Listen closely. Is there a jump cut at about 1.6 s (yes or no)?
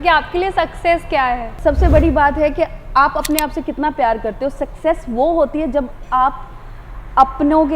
yes